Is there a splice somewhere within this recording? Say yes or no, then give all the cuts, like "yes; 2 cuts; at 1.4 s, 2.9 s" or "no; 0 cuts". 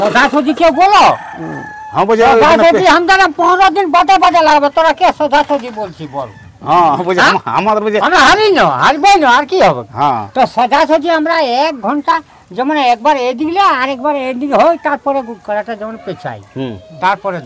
no; 0 cuts